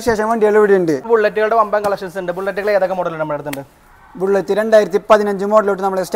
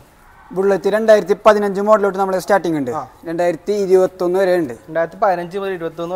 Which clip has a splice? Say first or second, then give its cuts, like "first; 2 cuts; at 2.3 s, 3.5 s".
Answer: first; 1 cut; at 1.1 s